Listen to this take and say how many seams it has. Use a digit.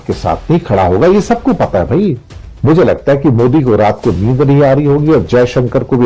1